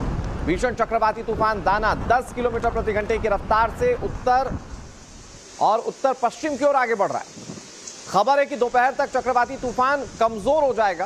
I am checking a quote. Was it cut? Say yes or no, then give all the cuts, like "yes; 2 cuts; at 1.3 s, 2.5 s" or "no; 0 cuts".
no; 0 cuts